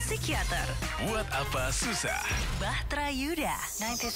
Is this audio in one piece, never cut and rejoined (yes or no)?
yes